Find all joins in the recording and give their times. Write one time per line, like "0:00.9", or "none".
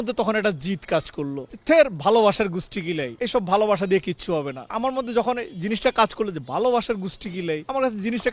none